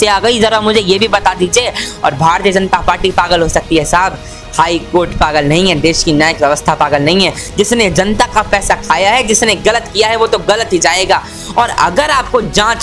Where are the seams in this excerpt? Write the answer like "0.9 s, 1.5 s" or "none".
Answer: 7.4 s